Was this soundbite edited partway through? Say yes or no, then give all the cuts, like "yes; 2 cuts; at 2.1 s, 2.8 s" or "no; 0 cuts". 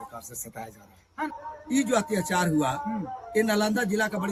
yes; 1 cut; at 1.5 s